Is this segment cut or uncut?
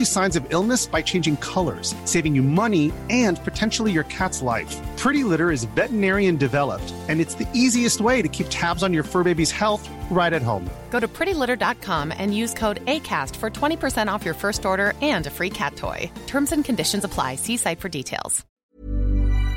cut